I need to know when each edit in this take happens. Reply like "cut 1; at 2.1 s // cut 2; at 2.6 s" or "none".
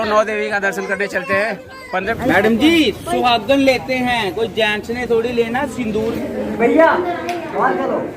cut 1; at 2.1 s // cut 2; at 5.9 s